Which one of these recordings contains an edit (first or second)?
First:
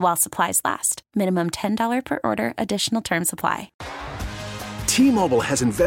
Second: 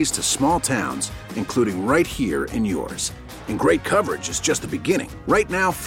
first